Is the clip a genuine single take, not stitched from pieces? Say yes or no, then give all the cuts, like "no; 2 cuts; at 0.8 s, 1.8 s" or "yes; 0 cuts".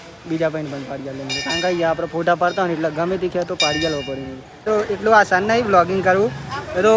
no; 1 cut; at 4.6 s